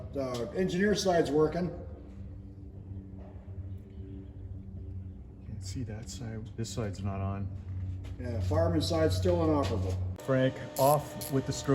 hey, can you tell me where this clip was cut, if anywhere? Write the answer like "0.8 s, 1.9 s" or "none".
9.9 s